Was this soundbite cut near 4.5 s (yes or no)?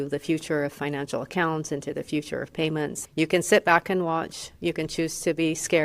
no